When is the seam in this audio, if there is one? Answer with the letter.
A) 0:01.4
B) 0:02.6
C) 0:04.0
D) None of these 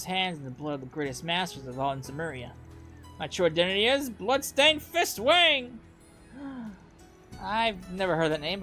D